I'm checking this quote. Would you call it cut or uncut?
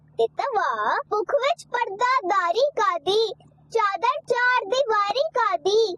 cut